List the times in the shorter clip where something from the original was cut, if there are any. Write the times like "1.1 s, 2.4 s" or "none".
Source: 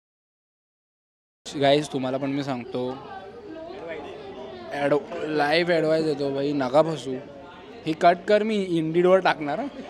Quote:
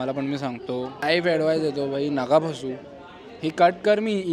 1.0 s